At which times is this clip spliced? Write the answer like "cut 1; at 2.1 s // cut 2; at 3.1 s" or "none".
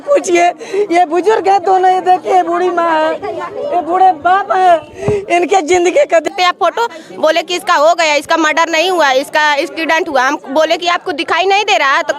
cut 1; at 6.3 s

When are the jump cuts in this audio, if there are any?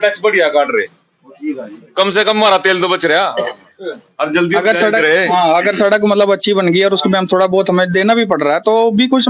none

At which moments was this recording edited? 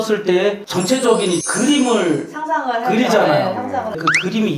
none

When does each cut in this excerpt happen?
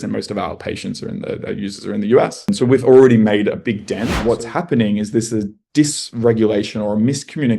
cut 1; at 4.2 s

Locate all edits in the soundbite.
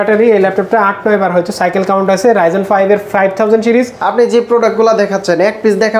cut 1; at 4.0 s

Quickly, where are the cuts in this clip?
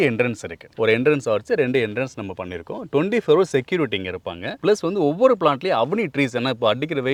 none

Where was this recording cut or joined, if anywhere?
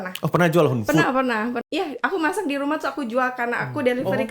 cut 1; at 1.6 s

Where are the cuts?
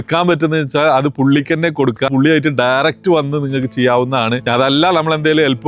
cut 1; at 2.1 s

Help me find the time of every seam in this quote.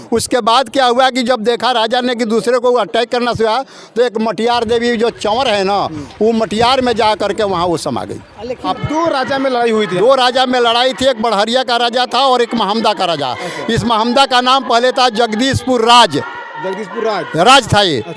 cut 1; at 8.7 s

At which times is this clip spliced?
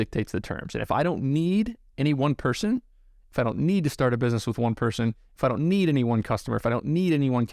none

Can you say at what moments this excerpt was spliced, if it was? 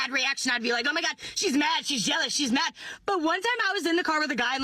cut 1; at 3.6 s

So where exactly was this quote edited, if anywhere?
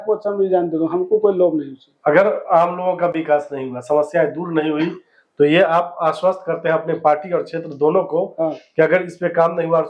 none

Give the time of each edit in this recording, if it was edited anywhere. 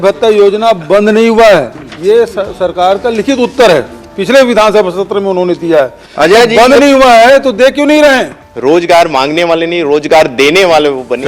cut 1; at 8.4 s

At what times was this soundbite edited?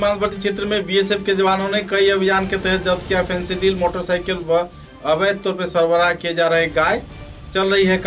none

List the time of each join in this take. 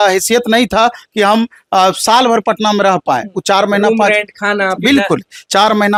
none

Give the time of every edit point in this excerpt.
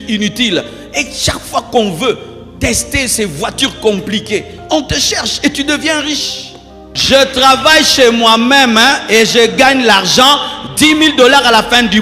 cut 1; at 6.9 s

